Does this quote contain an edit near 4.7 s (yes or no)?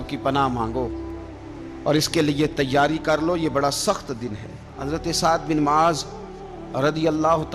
yes